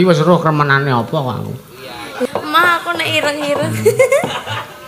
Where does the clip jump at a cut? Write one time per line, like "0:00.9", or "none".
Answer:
0:02.3